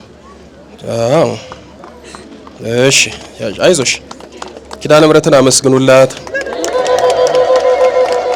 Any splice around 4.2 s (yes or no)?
no